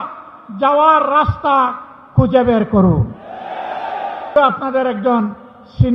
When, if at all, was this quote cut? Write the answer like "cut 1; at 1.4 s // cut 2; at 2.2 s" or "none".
cut 1; at 4.3 s